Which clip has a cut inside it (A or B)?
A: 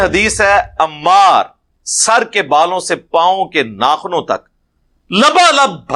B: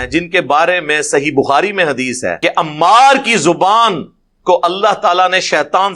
B